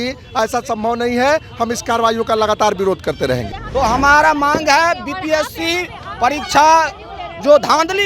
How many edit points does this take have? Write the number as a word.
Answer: one